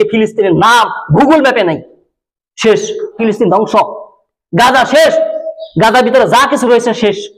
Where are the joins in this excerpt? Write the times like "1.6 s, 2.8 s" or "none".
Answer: 3.2 s